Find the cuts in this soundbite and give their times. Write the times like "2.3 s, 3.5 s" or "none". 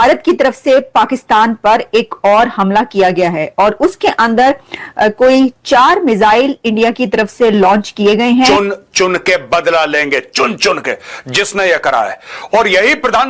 8.5 s